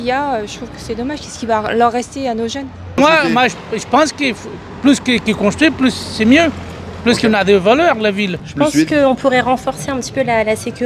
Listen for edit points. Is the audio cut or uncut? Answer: cut